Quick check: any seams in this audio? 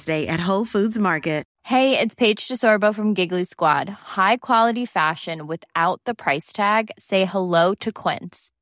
yes; 1 cut; at 1.5 s

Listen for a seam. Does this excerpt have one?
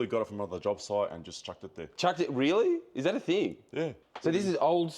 yes; 1 cut; at 4.0 s

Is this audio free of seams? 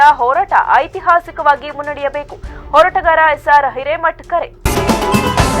no; 1 cut; at 4.6 s

